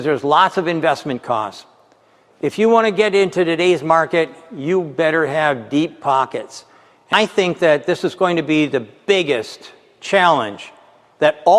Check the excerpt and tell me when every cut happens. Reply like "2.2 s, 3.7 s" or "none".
7.1 s